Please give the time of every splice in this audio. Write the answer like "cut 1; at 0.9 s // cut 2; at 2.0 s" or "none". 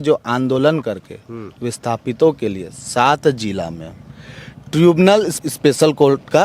cut 1; at 5.3 s